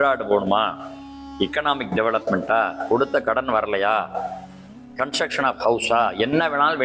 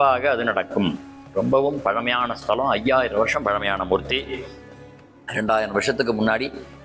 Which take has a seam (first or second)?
second